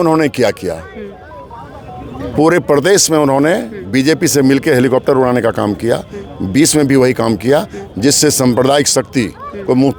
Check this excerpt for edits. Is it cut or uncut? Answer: uncut